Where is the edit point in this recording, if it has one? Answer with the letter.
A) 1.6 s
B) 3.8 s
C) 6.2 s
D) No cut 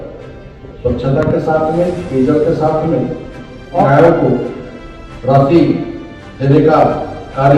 B